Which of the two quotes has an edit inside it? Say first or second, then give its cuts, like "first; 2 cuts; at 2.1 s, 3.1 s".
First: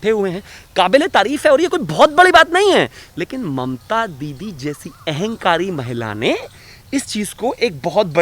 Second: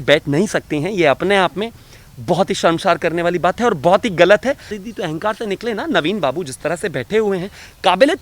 second; 1 cut; at 4.7 s